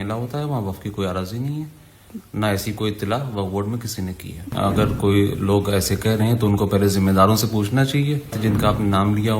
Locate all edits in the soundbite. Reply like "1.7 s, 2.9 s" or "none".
4.5 s, 8.4 s